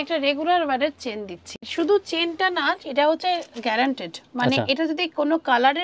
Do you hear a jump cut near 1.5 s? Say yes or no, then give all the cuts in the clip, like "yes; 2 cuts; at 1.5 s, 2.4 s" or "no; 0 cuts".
yes; 1 cut; at 1.5 s